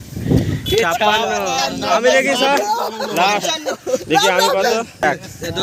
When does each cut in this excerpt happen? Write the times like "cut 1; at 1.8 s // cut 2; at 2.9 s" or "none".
none